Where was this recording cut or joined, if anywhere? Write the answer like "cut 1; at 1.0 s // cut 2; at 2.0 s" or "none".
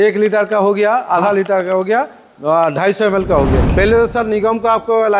cut 1; at 3.7 s

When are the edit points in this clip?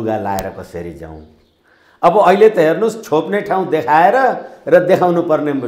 none

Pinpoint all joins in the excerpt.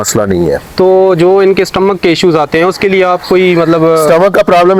none

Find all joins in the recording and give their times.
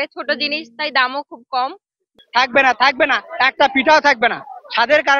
cut 1; at 2.1 s

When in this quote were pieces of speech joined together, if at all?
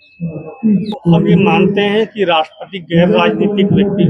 cut 1; at 1.0 s

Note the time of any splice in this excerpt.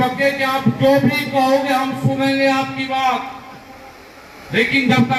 none

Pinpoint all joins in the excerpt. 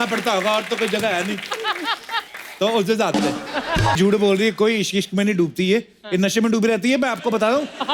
cut 1; at 4.0 s

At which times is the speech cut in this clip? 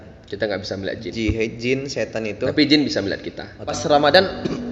cut 1; at 3.7 s

